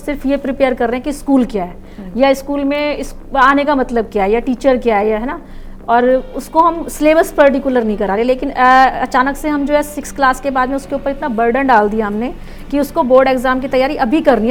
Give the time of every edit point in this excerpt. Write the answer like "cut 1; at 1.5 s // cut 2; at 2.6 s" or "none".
none

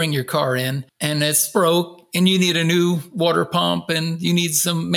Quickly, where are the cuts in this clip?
cut 1; at 1.5 s

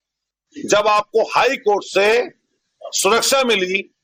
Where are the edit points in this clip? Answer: none

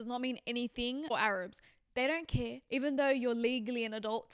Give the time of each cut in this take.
cut 1; at 1.1 s // cut 2; at 2.6 s

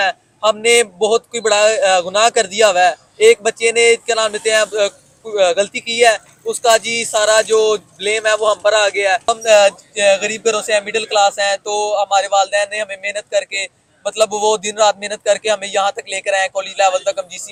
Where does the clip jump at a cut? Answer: none

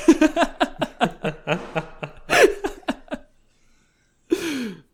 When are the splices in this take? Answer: none

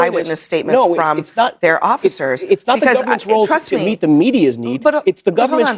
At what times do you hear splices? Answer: cut 1; at 2.0 s

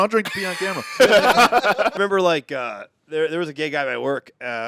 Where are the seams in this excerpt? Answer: cut 1; at 2.0 s

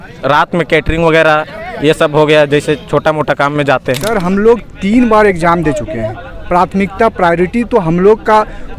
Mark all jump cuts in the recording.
cut 1; at 4.1 s

